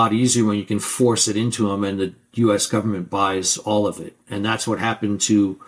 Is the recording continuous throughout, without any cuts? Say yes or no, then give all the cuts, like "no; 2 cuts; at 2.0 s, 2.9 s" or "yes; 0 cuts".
yes; 0 cuts